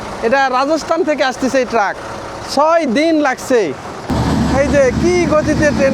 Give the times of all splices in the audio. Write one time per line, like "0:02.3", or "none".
0:04.1